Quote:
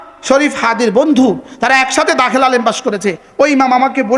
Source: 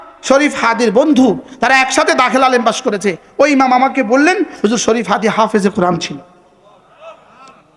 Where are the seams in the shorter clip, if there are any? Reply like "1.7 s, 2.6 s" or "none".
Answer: none